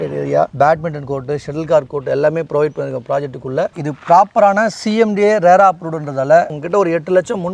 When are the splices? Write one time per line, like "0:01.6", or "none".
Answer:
0:03.7
0:06.5